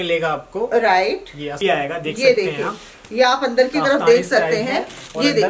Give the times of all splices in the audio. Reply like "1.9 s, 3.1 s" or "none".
1.5 s